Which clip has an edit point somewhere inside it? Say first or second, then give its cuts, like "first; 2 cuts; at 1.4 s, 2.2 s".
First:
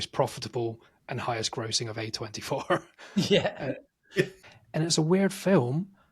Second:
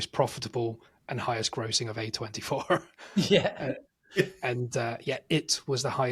first; 1 cut; at 4.4 s